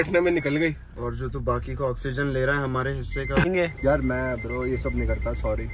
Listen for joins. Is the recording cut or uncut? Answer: cut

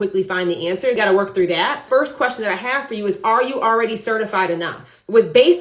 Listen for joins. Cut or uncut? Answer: cut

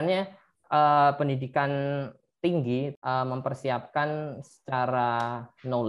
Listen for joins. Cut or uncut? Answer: cut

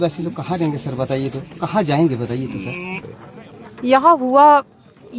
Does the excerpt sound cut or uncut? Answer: cut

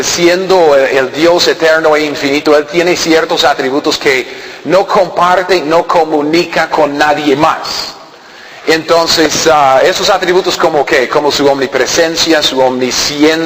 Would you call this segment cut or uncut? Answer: uncut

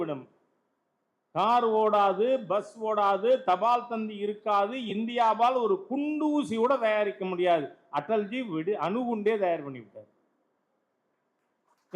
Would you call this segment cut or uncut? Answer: uncut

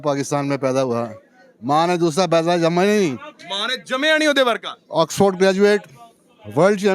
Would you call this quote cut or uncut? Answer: uncut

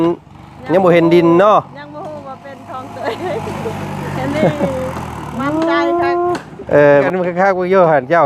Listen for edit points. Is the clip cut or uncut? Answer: cut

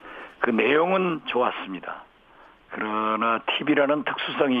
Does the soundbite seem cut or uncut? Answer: cut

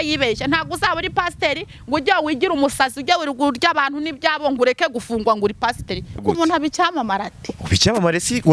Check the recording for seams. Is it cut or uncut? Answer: cut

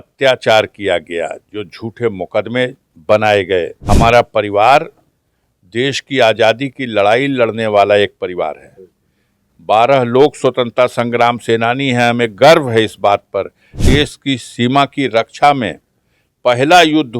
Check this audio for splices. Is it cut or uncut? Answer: cut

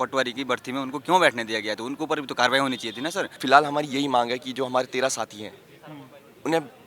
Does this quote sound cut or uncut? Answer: cut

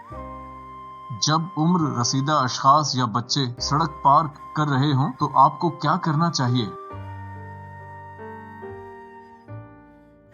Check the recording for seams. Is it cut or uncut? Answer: cut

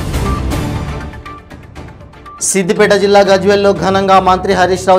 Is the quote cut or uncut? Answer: cut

